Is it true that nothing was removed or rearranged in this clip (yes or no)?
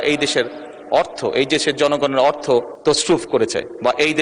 no